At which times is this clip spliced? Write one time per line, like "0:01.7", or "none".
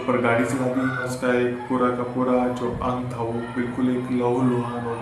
0:01.1